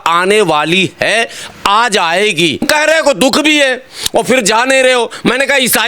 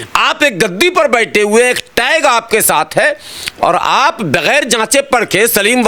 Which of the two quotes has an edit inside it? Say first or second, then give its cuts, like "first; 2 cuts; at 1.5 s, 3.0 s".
first; 1 cut; at 2.7 s